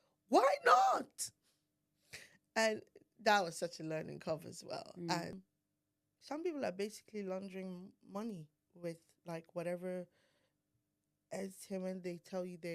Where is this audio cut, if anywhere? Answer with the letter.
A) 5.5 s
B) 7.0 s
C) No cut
A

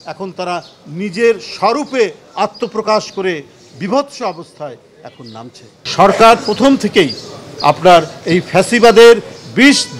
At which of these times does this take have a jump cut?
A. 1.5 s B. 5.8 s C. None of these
B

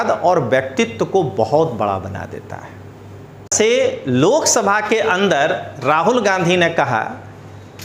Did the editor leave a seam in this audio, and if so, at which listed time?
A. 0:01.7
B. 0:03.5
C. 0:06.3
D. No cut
B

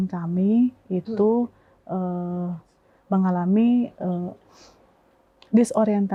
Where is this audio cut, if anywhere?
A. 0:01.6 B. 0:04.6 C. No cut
C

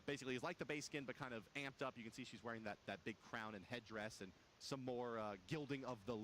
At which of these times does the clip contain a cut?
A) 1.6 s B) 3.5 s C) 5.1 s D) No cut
B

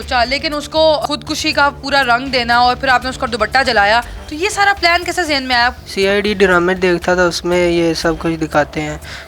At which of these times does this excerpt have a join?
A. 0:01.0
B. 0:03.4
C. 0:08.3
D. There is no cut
A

